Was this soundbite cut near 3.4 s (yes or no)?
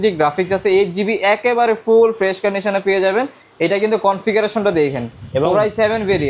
yes